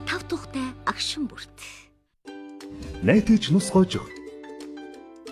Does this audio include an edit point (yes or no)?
yes